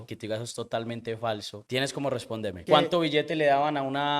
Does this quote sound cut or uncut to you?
cut